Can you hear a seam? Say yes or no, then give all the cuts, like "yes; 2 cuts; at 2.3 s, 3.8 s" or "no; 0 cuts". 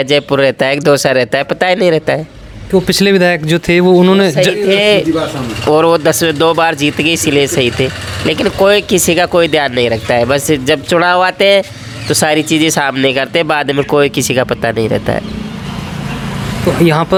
no; 0 cuts